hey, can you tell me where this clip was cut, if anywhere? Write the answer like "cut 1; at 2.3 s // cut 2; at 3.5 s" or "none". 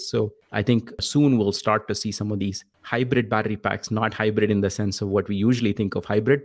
cut 1; at 0.9 s // cut 2; at 2.7 s

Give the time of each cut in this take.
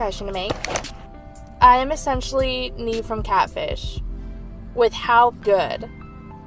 cut 1; at 5.4 s

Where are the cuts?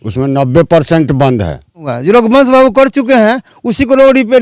cut 1; at 1.9 s

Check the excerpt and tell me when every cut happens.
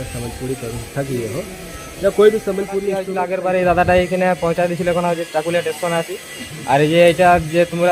cut 1; at 3.1 s

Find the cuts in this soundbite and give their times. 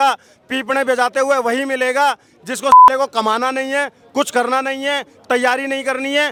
none

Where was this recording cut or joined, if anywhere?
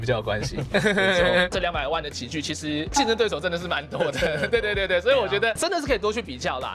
cut 1; at 1.5 s

